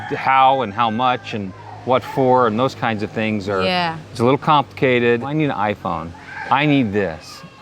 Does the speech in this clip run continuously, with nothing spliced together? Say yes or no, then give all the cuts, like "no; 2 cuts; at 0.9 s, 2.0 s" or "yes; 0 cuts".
no; 1 cut; at 5.3 s